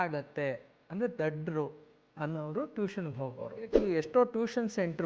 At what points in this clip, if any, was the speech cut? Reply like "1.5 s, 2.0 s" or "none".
3.8 s